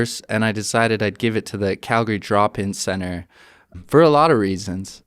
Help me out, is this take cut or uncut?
cut